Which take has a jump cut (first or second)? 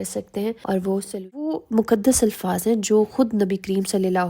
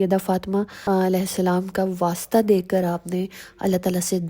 first